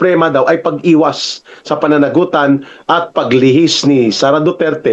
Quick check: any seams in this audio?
no; 0 cuts

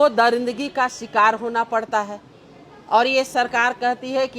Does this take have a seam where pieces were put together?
no; 0 cuts

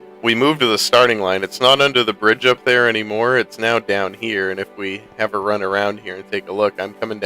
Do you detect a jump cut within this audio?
yes; 1 cut; at 5.8 s

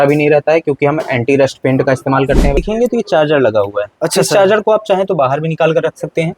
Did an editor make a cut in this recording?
yes; 1 cut; at 2.6 s

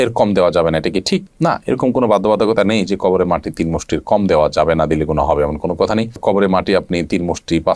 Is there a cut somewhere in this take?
no; 0 cuts

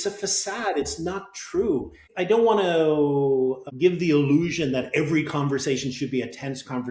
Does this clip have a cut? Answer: yes; 2 cuts; at 2.0 s, 3.7 s

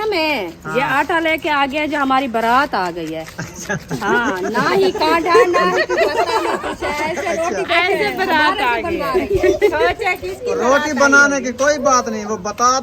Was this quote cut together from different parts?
no; 0 cuts

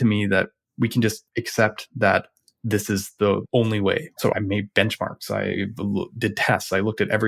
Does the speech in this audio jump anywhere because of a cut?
yes; 1 cut; at 4.3 s

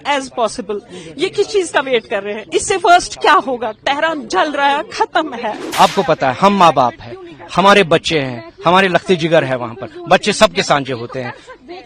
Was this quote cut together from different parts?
yes; 1 cut; at 5.6 s

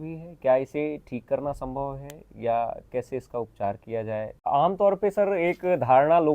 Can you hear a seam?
yes; 1 cut; at 4.4 s

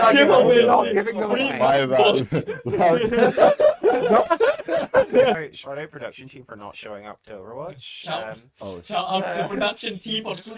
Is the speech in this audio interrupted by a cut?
yes; 1 cut; at 5.5 s

